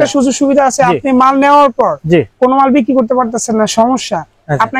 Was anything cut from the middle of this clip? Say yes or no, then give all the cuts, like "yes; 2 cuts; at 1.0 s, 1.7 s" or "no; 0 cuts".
no; 0 cuts